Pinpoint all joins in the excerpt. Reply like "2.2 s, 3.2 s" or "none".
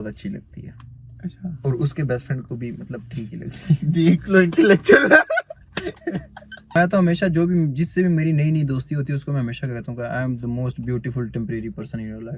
6.7 s